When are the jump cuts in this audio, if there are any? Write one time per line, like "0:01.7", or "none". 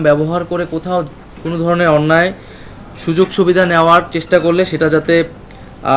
none